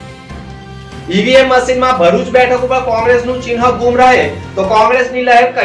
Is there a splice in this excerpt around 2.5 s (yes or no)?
no